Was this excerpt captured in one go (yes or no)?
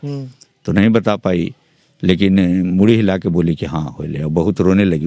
yes